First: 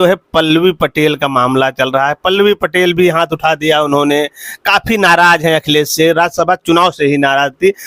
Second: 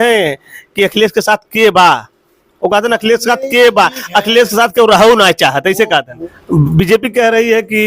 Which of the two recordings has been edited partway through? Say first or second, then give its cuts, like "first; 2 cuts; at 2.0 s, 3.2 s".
second; 1 cut; at 6.1 s